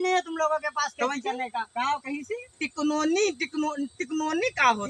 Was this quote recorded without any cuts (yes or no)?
yes